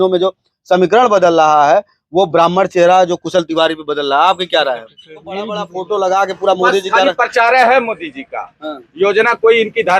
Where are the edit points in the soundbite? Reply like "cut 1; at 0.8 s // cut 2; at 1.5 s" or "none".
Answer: cut 1; at 5.5 s